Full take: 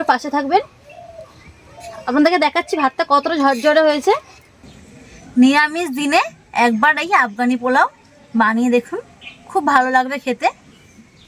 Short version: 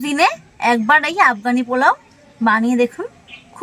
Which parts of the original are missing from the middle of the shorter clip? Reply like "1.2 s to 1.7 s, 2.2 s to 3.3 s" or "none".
none